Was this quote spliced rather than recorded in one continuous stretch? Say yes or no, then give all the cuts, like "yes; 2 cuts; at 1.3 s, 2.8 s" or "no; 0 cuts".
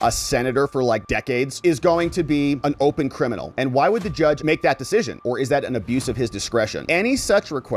yes; 1 cut; at 6.8 s